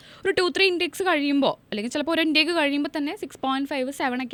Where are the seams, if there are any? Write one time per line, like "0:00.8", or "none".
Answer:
none